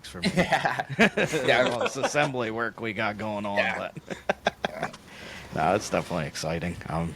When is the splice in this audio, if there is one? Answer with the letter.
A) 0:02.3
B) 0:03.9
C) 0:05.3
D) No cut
D